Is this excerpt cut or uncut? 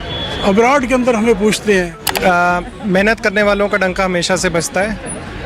cut